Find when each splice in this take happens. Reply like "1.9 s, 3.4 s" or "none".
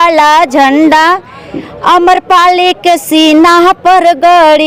none